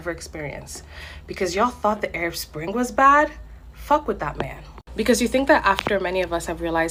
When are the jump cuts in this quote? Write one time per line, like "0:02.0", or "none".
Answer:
none